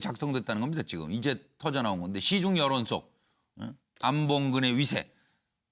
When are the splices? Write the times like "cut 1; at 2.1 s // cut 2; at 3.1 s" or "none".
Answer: none